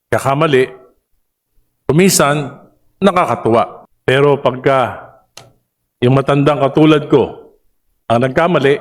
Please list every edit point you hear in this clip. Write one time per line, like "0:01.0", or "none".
0:03.9